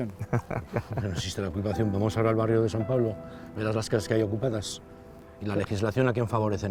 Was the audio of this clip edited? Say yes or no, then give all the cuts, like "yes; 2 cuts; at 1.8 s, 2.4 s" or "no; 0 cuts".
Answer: no; 0 cuts